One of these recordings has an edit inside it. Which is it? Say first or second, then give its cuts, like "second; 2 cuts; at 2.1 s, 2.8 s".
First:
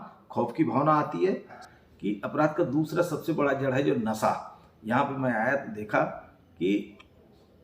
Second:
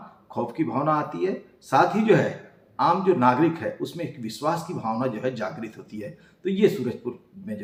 first; 1 cut; at 1.6 s